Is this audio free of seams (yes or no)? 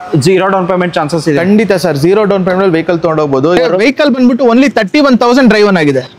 no